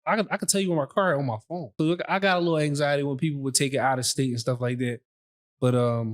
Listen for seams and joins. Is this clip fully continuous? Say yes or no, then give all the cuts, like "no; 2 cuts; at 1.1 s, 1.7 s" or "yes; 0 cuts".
no; 1 cut; at 1.7 s